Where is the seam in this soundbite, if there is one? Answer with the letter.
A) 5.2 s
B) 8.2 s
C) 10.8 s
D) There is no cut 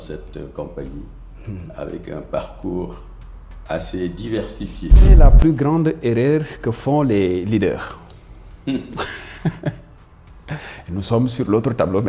A